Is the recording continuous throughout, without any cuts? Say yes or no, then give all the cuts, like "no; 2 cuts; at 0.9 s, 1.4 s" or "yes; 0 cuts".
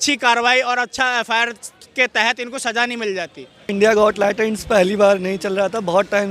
no; 1 cut; at 3.7 s